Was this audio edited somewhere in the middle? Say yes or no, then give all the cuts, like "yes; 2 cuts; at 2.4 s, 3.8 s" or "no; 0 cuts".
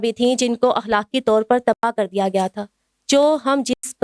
no; 0 cuts